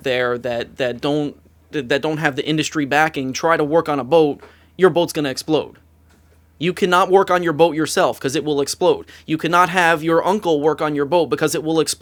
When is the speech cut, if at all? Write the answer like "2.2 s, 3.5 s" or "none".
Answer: none